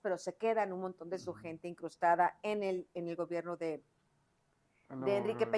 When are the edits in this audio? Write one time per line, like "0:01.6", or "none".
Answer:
none